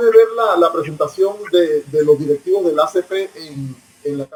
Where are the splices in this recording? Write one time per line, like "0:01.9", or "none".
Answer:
none